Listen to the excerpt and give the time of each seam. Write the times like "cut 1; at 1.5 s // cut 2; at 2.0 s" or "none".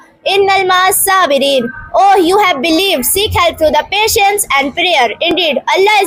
none